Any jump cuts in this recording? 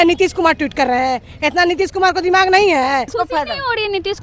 yes; 1 cut; at 3.1 s

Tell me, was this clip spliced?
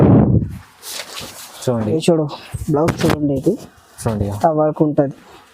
yes; 1 cut; at 1.9 s

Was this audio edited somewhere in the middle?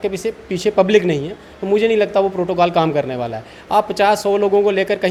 no; 0 cuts

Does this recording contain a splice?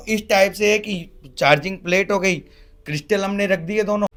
no; 0 cuts

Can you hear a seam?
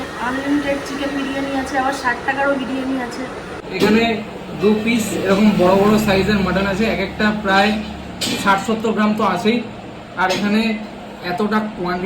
yes; 1 cut; at 3.6 s

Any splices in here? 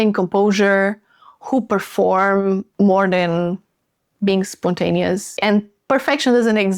yes; 2 cuts; at 2.7 s, 5.3 s

